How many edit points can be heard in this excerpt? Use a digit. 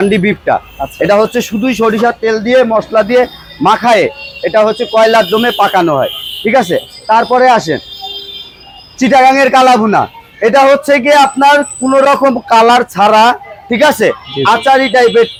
0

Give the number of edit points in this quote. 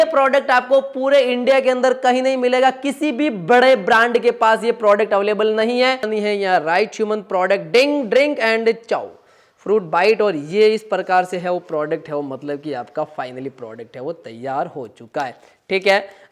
1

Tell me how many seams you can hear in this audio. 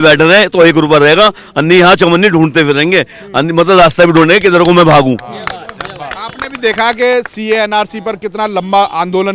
0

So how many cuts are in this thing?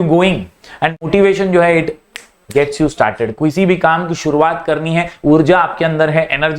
1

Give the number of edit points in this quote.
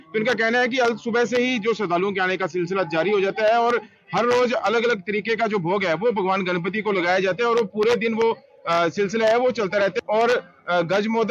1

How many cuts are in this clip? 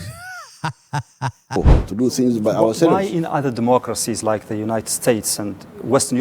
1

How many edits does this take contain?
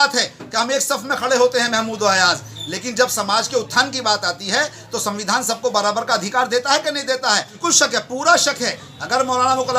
1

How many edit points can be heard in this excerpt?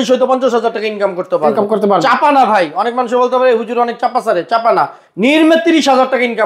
0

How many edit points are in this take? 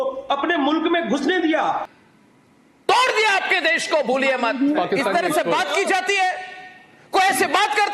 2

